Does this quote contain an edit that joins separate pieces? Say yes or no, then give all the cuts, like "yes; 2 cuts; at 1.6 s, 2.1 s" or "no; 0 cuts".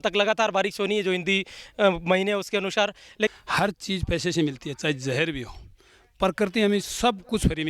yes; 1 cut; at 3.3 s